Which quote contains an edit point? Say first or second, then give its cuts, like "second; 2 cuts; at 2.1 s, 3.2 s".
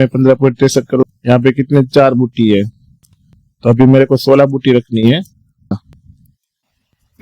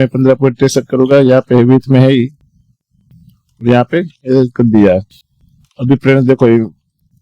first; 2 cuts; at 1.1 s, 5.8 s